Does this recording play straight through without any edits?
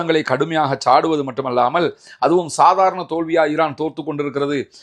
yes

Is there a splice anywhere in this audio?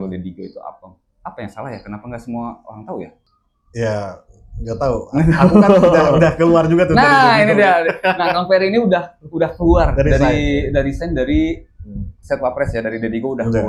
no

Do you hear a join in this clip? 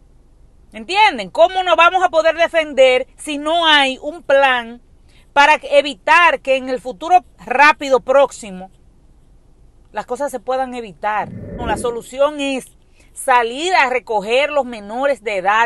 yes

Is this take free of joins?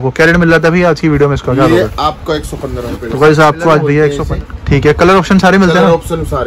no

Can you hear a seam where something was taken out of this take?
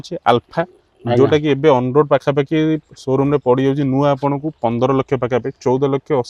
no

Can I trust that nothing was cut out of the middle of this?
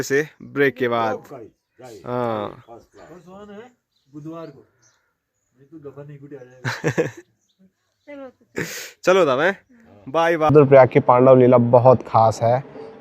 no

